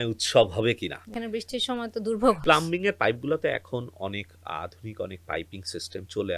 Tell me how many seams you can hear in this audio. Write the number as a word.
two